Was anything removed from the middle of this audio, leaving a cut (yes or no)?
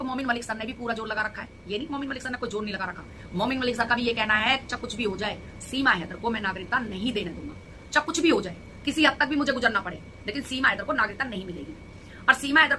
no